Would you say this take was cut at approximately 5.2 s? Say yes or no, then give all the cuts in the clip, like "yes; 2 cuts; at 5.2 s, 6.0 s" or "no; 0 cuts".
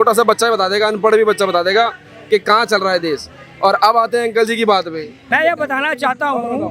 yes; 1 cut; at 5.2 s